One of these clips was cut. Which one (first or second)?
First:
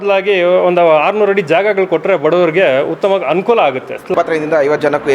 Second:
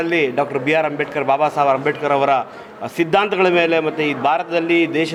first